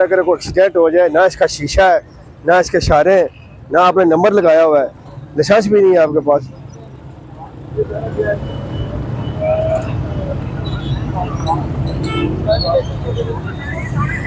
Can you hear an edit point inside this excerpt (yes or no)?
no